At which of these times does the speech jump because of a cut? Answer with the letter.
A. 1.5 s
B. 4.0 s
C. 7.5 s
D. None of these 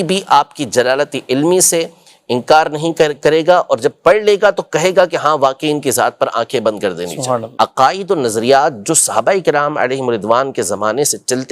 C